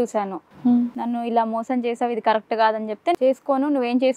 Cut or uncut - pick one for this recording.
cut